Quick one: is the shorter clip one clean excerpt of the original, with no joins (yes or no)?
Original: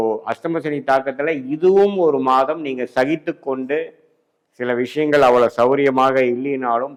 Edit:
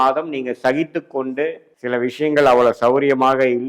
no